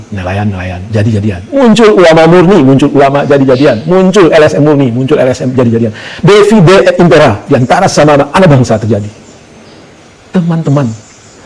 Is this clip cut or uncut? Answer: uncut